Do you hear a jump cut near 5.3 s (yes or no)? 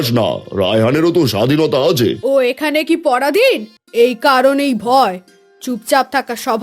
no